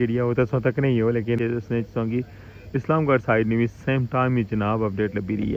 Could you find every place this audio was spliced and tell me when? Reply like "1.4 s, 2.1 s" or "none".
1.4 s

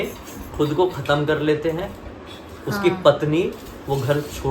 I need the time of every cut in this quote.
none

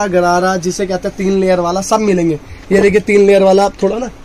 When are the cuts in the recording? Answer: none

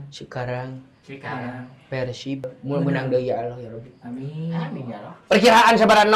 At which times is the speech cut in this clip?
2.6 s

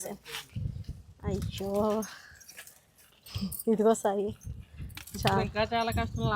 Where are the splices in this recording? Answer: none

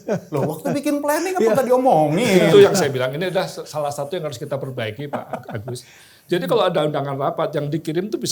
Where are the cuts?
none

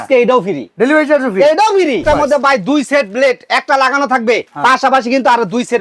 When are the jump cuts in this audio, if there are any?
2.0 s, 4.5 s

